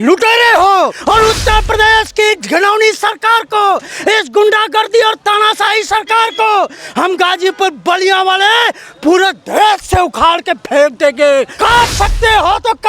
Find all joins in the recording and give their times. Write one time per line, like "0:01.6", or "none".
0:01.0
0:11.5